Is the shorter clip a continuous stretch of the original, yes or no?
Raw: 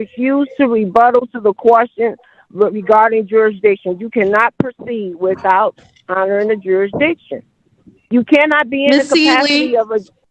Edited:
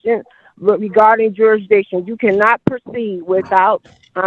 yes